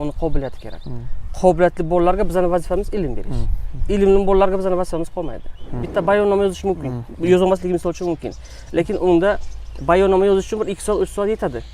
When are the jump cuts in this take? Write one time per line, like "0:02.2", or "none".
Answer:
0:05.9